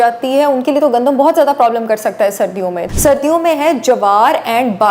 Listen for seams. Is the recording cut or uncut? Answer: cut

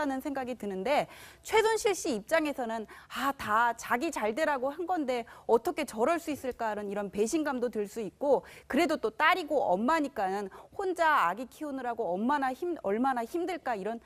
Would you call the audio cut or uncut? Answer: uncut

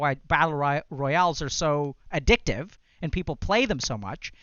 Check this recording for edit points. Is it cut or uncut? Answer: uncut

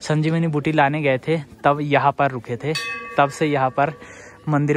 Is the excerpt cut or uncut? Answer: uncut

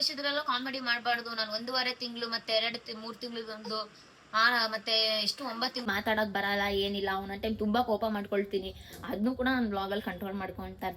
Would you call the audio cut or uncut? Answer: cut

